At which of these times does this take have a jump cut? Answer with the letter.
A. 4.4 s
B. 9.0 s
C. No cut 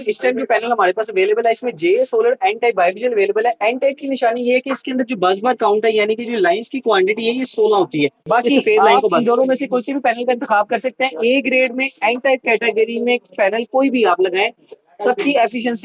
B